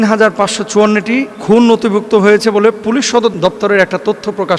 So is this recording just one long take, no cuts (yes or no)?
no